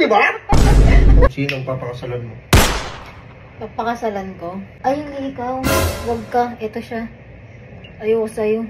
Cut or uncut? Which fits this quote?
cut